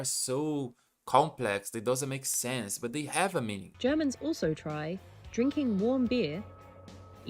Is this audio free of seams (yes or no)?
no